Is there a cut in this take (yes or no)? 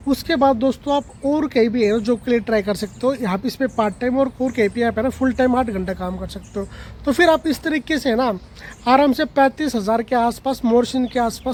no